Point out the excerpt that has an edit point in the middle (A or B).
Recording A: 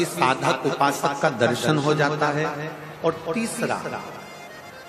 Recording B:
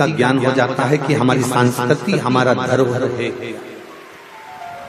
A